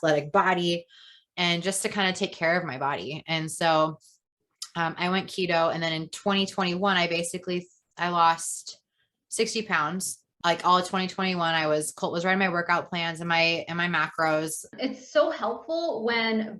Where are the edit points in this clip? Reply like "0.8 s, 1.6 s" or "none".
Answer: 10.2 s, 14.6 s